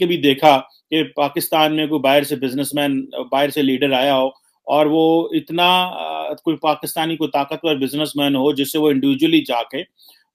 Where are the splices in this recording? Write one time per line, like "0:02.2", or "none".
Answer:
none